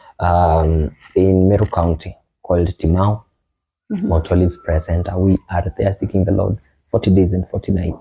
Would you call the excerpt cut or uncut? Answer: uncut